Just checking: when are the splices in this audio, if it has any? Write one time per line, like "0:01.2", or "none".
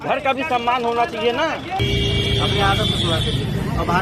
0:01.7